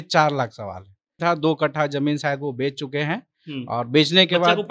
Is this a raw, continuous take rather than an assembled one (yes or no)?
no